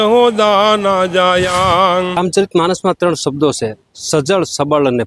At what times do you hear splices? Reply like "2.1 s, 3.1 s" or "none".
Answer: 2.2 s